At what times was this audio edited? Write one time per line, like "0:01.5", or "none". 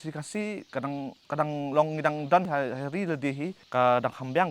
0:02.5